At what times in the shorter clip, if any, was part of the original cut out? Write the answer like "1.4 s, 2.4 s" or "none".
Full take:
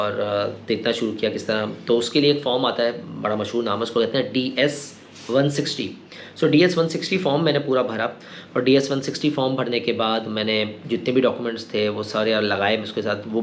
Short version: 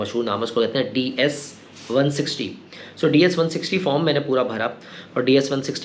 none